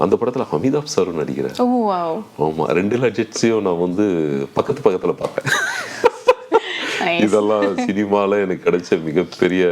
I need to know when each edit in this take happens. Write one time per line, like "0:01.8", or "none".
none